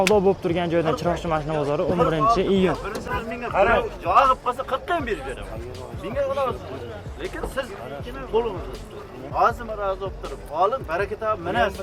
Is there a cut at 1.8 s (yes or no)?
no